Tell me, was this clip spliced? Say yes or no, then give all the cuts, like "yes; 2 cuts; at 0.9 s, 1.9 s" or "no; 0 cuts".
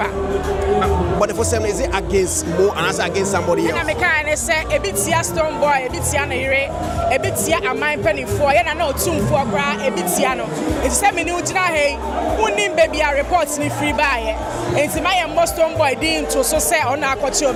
no; 0 cuts